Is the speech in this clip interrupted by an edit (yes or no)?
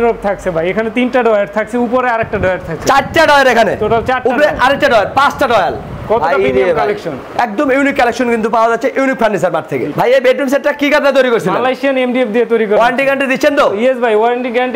no